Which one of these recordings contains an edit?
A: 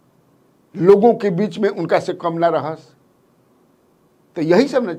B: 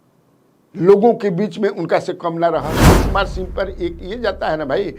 B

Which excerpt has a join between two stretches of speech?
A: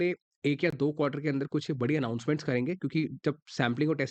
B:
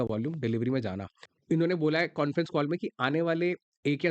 B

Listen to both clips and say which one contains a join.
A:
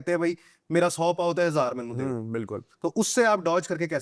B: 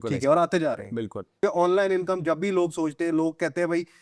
B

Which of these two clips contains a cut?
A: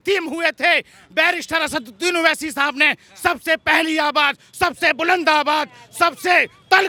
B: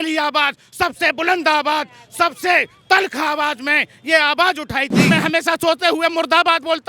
B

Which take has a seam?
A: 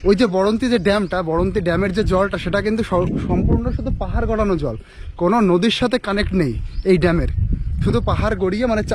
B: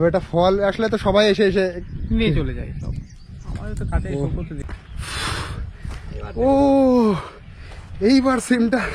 B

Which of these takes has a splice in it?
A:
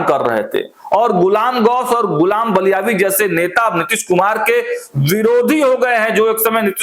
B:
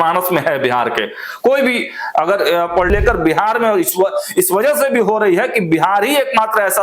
B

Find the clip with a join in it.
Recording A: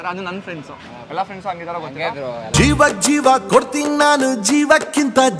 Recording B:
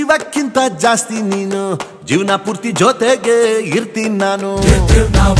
A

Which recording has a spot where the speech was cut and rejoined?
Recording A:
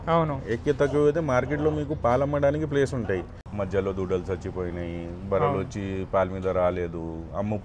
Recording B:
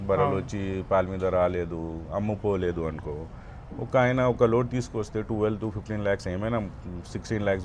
A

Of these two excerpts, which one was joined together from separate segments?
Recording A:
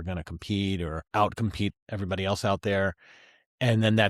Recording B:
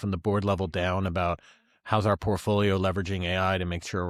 A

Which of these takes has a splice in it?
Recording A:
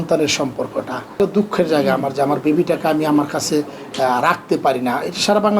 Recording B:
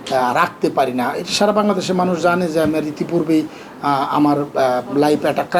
A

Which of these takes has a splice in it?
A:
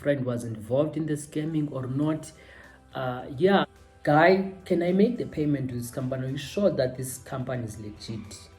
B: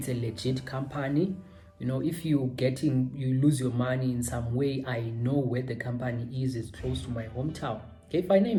A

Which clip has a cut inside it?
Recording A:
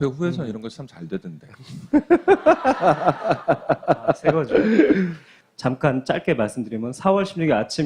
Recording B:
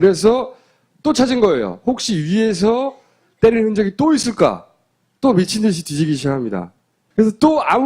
B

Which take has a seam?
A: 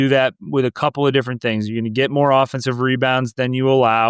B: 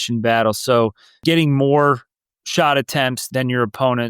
B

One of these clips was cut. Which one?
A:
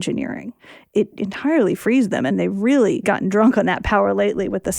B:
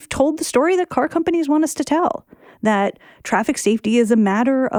A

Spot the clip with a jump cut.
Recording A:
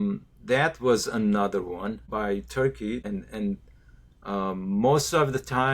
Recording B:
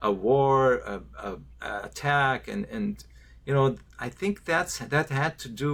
A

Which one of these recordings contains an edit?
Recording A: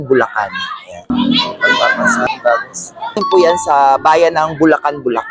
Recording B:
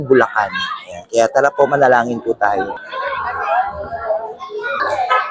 A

